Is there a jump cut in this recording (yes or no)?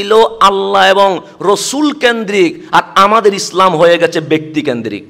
no